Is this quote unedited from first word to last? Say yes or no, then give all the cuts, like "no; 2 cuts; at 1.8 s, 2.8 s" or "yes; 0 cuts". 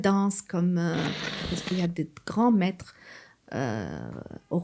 no; 1 cut; at 1.6 s